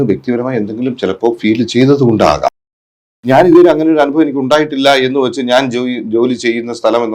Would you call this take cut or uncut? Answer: cut